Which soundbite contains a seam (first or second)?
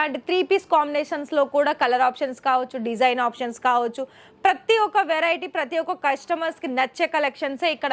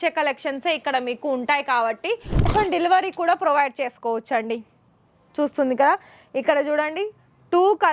second